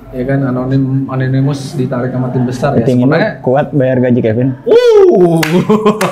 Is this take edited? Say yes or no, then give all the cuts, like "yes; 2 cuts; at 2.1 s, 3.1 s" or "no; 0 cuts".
no; 0 cuts